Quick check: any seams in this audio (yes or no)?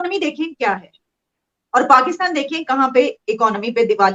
no